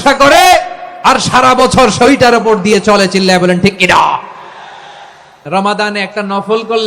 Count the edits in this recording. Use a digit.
1